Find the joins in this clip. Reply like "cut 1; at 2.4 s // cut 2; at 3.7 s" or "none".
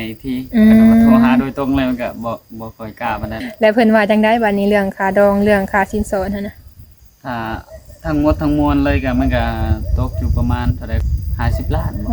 cut 1; at 3.4 s // cut 2; at 11.0 s